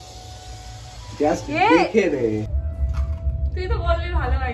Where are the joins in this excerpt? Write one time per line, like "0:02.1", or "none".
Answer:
0:02.5